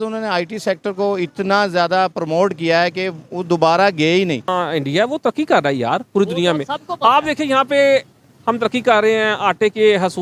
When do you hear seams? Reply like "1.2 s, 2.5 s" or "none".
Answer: 4.5 s